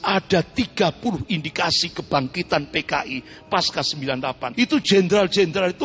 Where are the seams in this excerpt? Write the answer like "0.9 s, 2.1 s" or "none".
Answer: 4.5 s